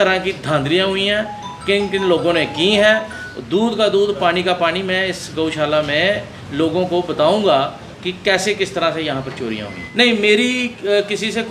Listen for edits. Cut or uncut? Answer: uncut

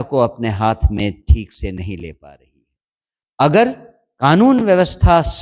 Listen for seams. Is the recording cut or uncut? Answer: uncut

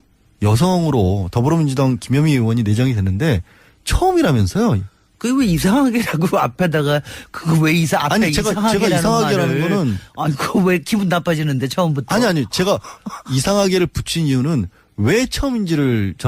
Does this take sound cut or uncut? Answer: cut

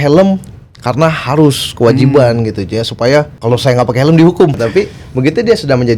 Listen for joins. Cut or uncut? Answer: cut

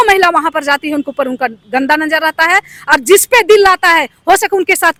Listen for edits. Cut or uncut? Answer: uncut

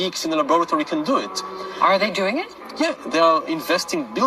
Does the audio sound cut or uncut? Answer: uncut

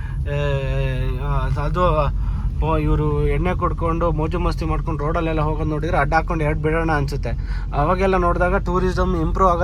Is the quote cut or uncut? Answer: uncut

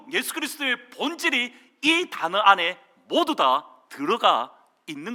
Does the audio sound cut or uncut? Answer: uncut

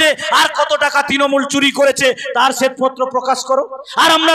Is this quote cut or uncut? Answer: uncut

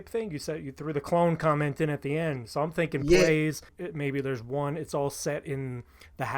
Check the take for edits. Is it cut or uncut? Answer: cut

